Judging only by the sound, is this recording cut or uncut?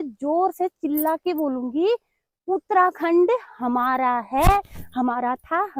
uncut